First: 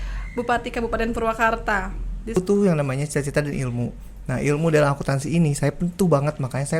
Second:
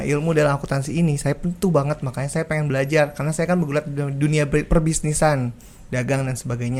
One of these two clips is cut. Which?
first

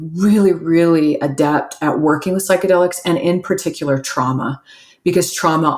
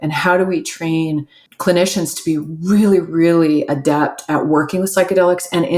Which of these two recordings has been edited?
second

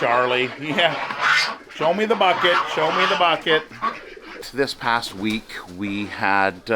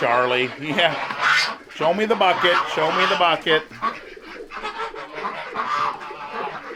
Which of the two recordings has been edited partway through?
first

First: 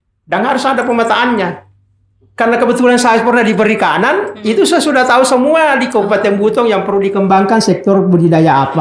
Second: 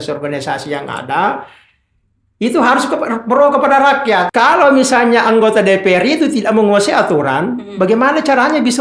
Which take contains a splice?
second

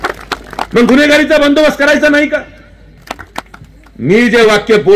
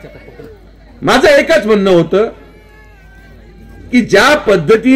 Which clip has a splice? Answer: first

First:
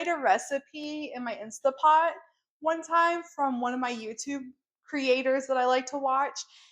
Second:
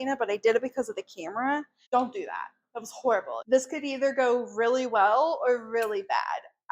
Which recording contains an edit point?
second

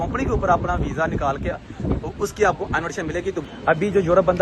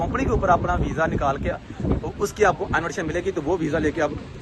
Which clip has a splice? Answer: first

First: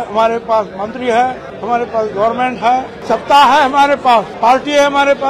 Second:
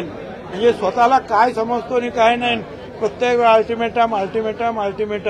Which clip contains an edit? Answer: first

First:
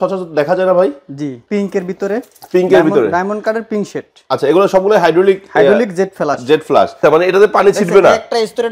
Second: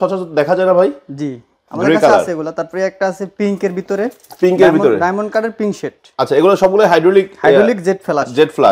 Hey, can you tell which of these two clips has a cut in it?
first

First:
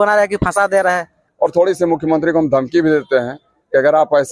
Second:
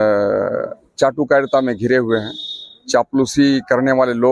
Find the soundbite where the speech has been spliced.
first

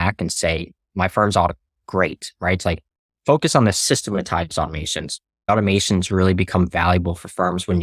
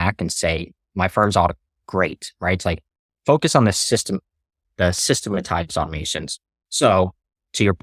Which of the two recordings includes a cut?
first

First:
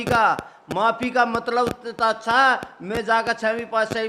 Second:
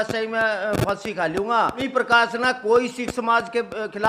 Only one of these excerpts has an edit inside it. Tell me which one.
second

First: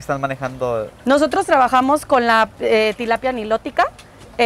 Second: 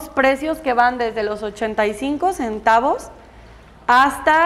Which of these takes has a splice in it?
first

